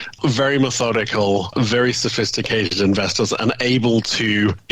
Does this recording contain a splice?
yes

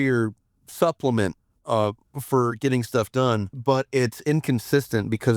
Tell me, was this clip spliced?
yes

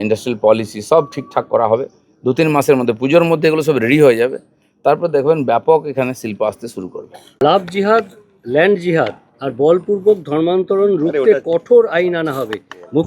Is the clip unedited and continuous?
no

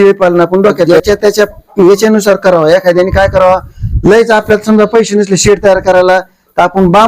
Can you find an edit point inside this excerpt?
yes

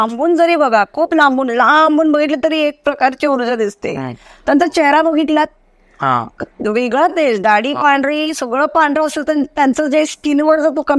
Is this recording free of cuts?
yes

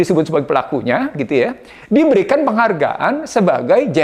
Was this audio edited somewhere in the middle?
no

